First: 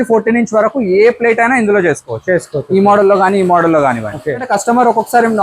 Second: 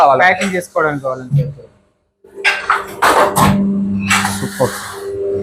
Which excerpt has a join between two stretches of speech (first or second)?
first